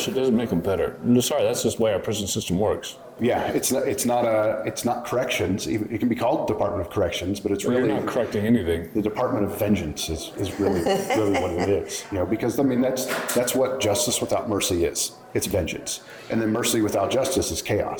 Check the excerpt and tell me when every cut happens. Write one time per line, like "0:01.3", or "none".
none